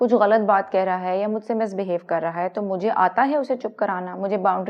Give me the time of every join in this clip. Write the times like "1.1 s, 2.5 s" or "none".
none